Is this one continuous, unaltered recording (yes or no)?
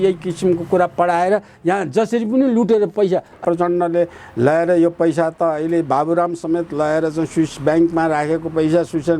no